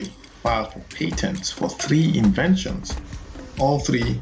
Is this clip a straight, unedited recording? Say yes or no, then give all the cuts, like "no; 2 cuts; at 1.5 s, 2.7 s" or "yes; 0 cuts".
yes; 0 cuts